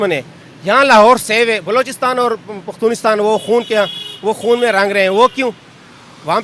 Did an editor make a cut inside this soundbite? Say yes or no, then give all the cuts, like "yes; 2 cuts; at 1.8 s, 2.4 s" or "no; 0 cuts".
no; 0 cuts